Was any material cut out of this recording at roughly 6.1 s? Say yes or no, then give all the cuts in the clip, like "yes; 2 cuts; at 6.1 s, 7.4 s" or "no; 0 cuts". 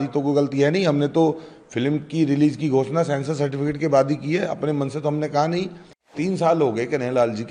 yes; 1 cut; at 6.1 s